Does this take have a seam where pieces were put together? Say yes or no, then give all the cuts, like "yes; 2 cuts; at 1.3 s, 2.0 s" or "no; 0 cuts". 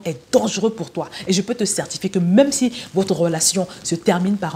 no; 0 cuts